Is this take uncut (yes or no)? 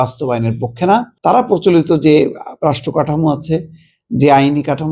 no